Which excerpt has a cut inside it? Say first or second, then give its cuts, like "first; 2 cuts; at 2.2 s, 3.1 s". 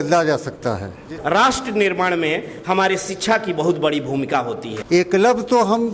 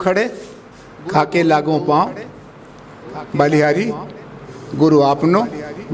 first; 2 cuts; at 1.1 s, 4.7 s